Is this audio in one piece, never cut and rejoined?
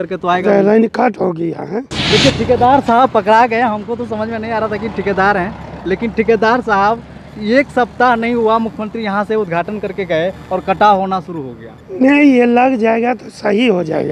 no; 1 cut; at 1.9 s

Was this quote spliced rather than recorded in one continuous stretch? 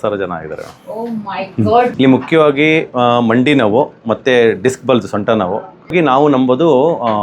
yes; 2 cuts; at 1.9 s, 5.9 s

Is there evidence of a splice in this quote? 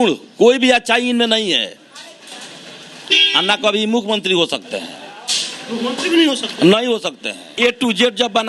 yes; 1 cut; at 7.5 s

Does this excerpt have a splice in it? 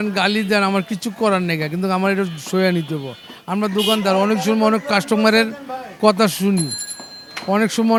no; 0 cuts

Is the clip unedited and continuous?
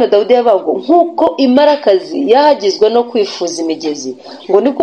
yes; 0 cuts

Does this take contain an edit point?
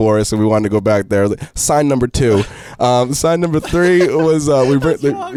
no; 0 cuts

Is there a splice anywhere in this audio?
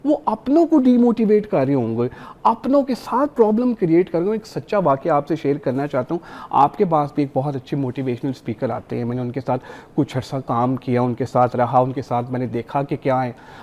no; 0 cuts

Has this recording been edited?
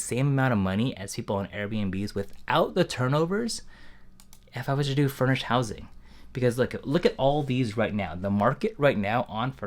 no; 0 cuts

